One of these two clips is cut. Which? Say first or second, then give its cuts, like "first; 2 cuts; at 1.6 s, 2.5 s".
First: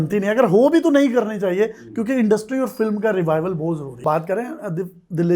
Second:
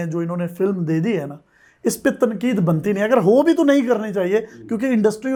first; 1 cut; at 3.9 s